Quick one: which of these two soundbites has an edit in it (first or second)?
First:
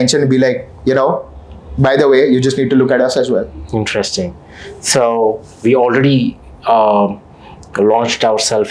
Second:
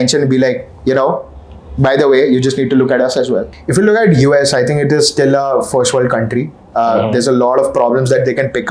second